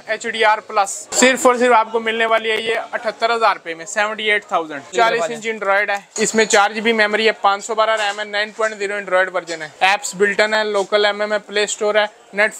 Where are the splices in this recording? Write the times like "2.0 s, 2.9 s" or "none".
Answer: 1.0 s, 4.9 s, 6.1 s, 9.6 s